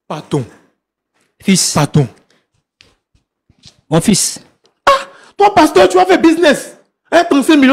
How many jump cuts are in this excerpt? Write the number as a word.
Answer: one